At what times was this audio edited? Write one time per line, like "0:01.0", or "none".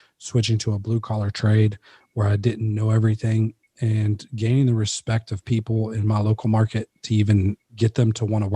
0:07.7

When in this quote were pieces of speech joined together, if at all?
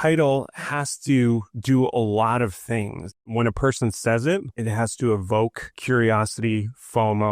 0:01.5
0:03.2
0:04.5
0:05.7

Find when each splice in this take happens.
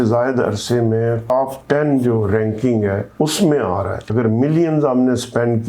0:01.2
0:03.1
0:04.1

